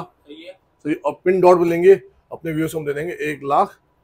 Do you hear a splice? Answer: no; 0 cuts

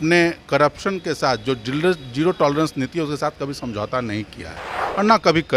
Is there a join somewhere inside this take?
no; 0 cuts

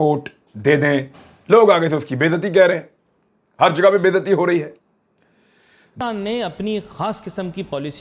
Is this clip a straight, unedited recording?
no; 1 cut; at 5.9 s

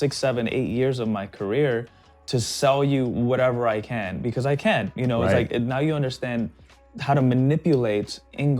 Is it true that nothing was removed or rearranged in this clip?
yes; 0 cuts

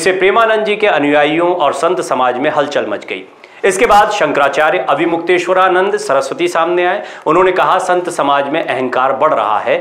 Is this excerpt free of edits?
yes; 0 cuts

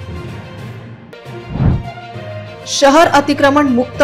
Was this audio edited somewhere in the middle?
yes; 1 cut; at 1.0 s

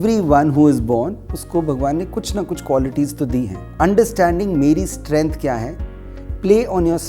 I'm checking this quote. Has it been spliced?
yes; 1 cut; at 3.6 s

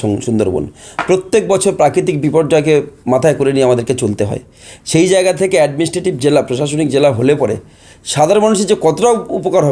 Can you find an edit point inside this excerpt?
no; 0 cuts

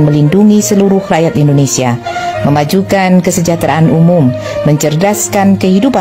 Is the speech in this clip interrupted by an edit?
no; 0 cuts

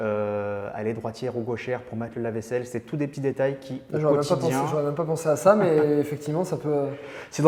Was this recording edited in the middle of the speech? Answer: no; 0 cuts

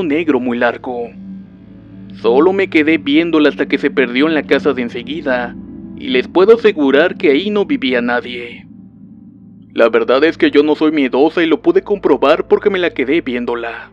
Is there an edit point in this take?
no; 0 cuts

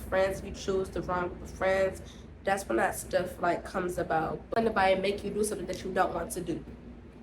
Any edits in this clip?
yes; 1 cut; at 4.4 s

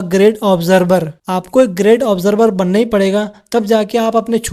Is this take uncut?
yes; 0 cuts

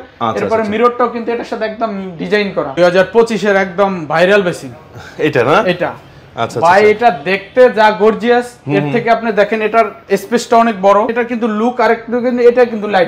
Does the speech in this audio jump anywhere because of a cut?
yes; 2 cuts; at 2.7 s, 11.1 s

